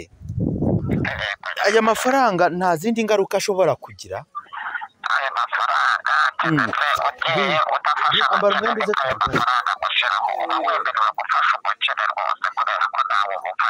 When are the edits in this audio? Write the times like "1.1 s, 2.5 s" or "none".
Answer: none

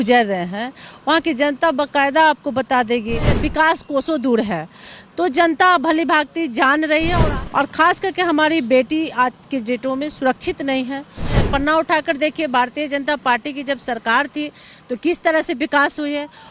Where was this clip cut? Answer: 3.4 s, 7.2 s, 11.4 s

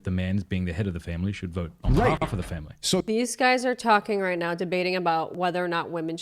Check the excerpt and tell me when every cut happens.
5.3 s

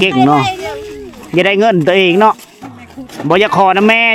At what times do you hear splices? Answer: none

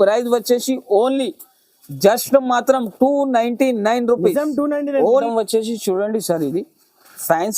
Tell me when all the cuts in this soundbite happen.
5.3 s

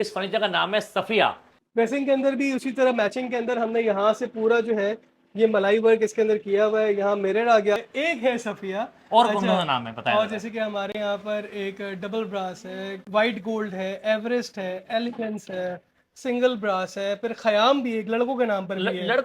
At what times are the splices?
1.5 s, 7.9 s

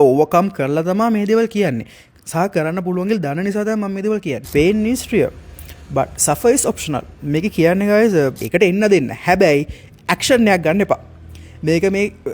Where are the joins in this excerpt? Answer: 4.5 s, 8.4 s

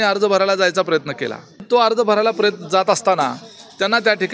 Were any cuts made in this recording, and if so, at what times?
1.6 s

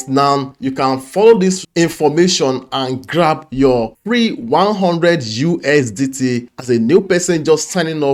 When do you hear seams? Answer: none

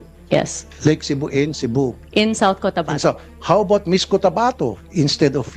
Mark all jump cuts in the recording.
none

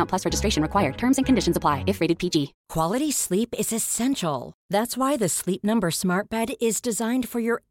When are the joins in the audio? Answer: 2.6 s

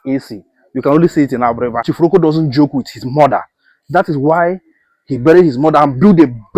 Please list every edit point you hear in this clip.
none

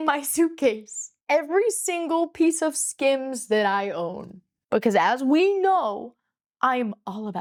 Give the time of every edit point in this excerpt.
none

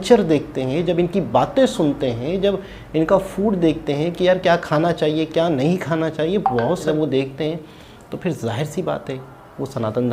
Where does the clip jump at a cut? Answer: 6.9 s

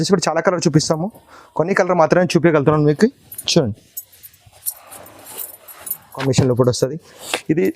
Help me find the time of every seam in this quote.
6.2 s

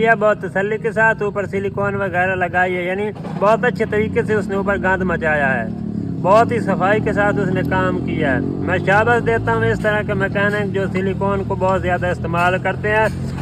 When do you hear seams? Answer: none

